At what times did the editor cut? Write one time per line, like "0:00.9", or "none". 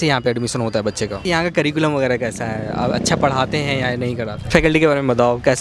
0:01.2
0:04.4